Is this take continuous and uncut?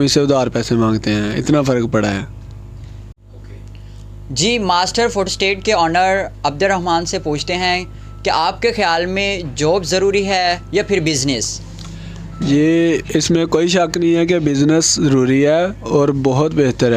yes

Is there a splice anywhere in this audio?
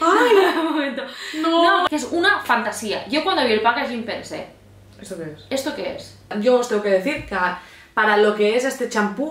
yes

